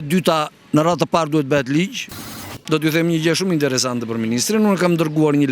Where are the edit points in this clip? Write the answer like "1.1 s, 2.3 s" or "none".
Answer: 2.1 s